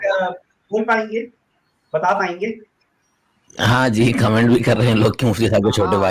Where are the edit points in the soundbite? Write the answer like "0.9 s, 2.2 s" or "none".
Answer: none